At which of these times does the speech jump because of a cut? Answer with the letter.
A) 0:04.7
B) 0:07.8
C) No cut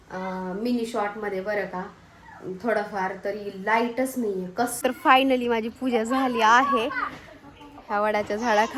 A